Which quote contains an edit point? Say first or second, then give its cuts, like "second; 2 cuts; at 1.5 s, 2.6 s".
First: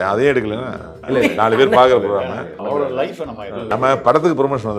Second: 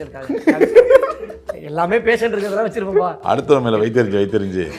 first; 3 cuts; at 1.0 s, 2.6 s, 3.7 s